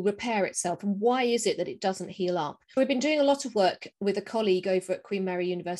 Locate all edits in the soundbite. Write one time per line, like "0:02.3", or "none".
0:02.8